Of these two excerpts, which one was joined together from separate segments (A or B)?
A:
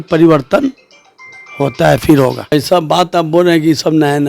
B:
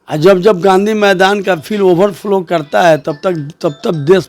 A